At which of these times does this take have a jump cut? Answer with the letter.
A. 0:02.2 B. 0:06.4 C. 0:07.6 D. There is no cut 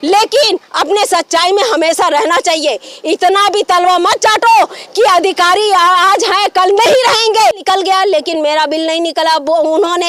C